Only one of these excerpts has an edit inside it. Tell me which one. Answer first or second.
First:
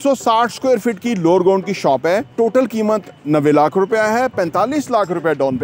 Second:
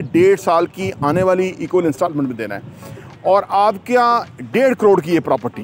first